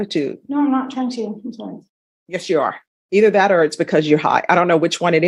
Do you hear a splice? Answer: no; 0 cuts

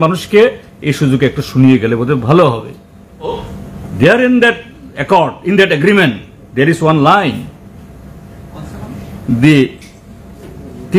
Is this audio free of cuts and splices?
no; 1 cut; at 3.3 s

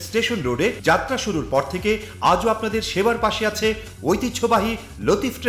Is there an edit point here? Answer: no; 0 cuts

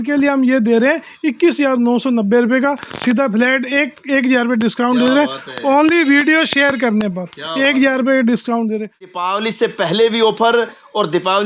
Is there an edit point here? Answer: yes; 1 cut; at 9.2 s

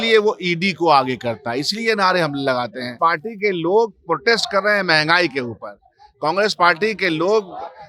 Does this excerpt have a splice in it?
yes; 1 cut; at 2.9 s

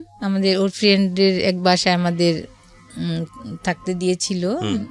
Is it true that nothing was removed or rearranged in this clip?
yes; 0 cuts

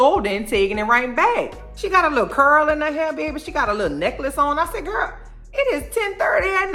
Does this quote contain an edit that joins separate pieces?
no; 0 cuts

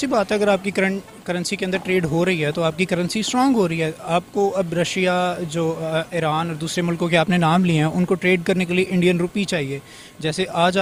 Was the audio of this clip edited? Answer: no; 0 cuts

